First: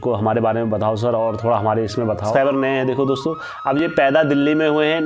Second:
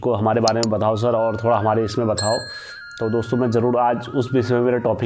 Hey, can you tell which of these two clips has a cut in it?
first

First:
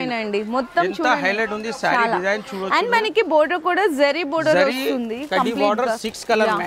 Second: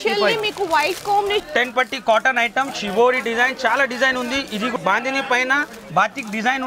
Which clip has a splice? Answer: second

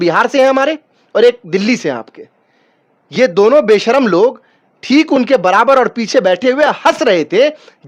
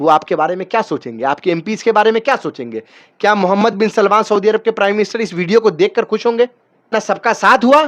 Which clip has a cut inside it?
second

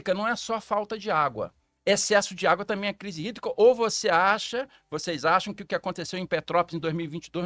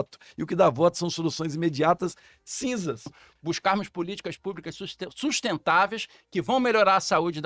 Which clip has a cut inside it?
second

